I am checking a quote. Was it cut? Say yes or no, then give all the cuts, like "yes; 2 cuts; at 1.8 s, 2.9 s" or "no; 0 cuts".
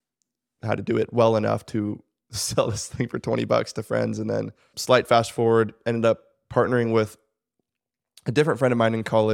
yes; 1 cut; at 4.7 s